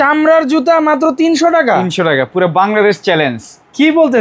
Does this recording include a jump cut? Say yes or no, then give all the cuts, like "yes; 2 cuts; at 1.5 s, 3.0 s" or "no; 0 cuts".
no; 0 cuts